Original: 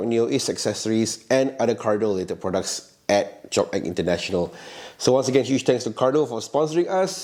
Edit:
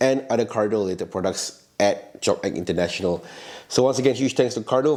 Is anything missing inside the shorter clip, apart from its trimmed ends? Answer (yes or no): no